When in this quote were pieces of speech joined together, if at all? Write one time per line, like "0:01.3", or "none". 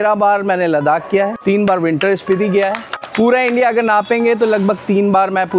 0:01.4
0:02.9